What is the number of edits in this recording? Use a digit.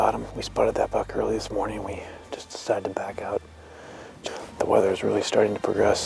1